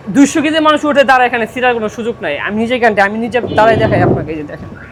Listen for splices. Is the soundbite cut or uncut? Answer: uncut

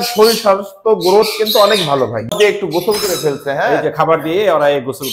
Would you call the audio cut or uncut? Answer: cut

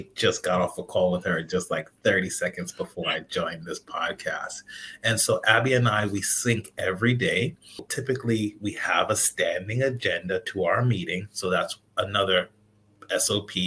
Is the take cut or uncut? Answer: cut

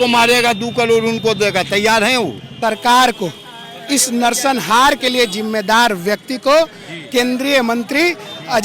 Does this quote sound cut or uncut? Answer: cut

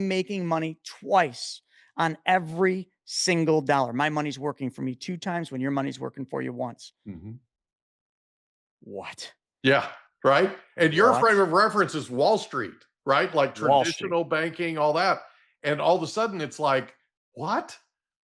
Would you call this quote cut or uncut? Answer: uncut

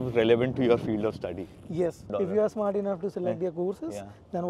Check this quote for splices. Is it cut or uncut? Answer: cut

